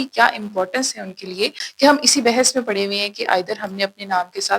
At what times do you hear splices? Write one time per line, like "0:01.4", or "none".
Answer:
0:01.6